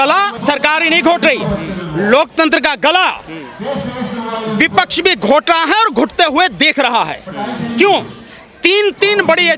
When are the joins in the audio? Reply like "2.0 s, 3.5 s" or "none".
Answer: none